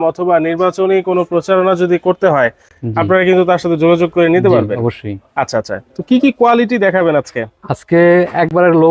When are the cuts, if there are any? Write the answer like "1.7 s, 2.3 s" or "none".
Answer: none